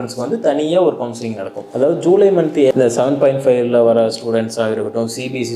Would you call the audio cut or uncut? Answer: cut